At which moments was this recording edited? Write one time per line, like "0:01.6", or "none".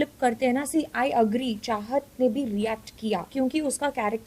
0:03.3